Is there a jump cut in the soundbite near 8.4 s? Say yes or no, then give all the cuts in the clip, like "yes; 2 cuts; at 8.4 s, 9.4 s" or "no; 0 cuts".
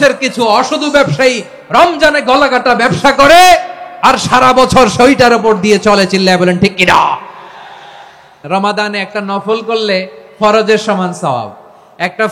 yes; 1 cut; at 8.4 s